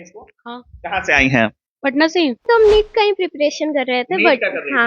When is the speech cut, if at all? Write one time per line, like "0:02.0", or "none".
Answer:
0:02.4